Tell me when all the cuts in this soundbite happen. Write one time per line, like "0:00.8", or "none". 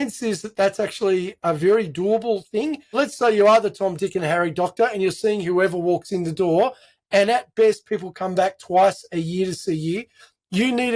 0:01.4
0:03.0